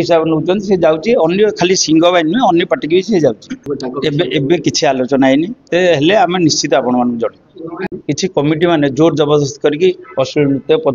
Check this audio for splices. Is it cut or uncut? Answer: cut